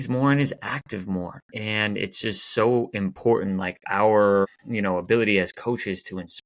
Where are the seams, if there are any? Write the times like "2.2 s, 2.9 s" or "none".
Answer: 4.6 s